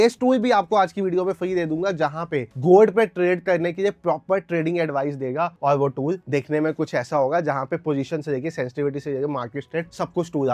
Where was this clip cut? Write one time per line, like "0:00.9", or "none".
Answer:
none

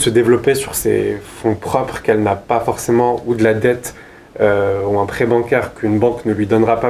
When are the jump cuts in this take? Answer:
none

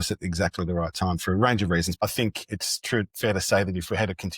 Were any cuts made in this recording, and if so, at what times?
0:02.0

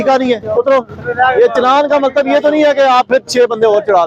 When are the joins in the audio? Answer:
none

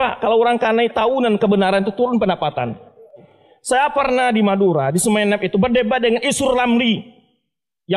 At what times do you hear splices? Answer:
0:03.3

